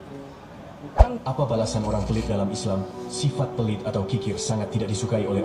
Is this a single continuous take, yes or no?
no